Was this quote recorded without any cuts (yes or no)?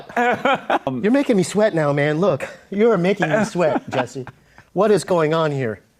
no